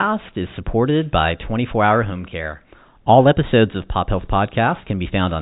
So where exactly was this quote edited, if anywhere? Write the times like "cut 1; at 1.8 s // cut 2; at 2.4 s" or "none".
none